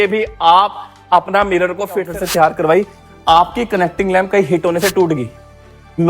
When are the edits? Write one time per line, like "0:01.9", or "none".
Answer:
0:02.1

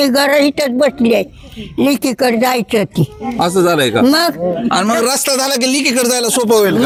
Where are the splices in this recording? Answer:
none

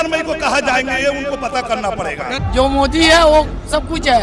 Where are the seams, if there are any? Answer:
0:02.3

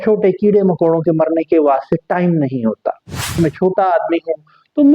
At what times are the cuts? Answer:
0:03.4

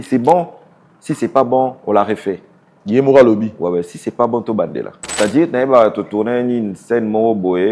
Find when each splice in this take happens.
0:05.0

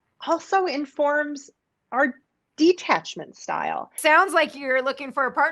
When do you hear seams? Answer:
0:03.9

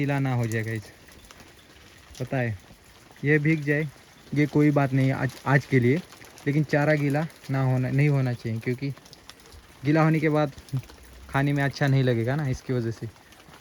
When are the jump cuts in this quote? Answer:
none

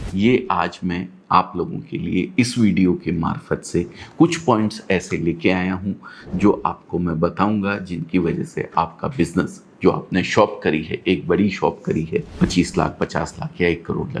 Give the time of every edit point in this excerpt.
0:12.3

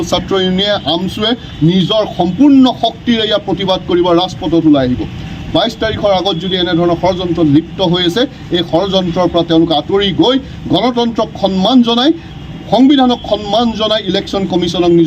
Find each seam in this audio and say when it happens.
none

